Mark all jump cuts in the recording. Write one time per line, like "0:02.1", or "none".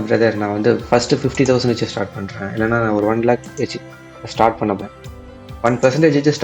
0:04.8